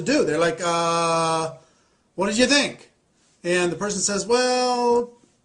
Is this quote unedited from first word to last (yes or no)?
no